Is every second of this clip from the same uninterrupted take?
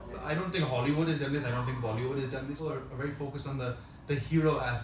no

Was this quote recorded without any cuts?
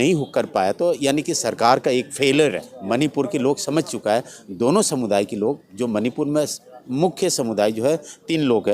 no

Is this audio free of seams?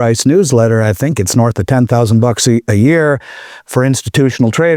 yes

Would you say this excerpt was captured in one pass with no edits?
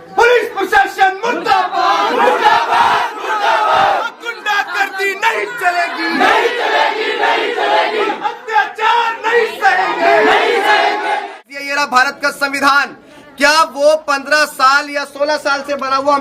no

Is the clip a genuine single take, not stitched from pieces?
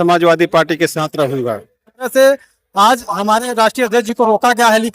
no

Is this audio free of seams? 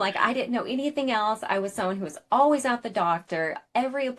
yes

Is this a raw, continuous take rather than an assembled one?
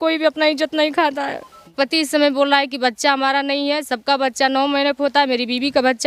no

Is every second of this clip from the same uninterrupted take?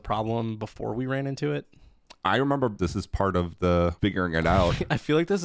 no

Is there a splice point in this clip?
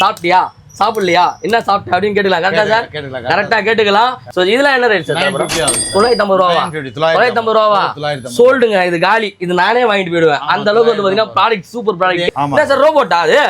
yes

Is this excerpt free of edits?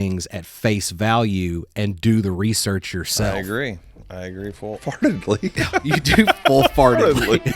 no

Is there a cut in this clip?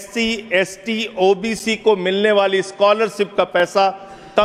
no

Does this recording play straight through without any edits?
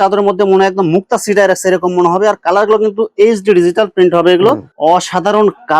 no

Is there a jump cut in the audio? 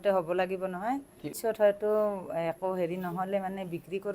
yes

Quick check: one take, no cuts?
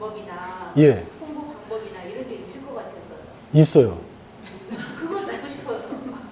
yes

